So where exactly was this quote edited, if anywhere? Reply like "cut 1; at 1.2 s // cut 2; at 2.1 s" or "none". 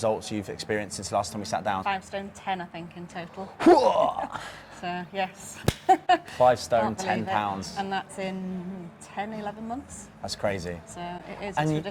cut 1; at 1.8 s

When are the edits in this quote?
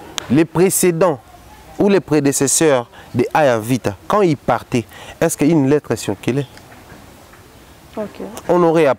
none

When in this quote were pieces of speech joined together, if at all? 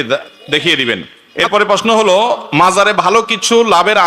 cut 1; at 1.4 s

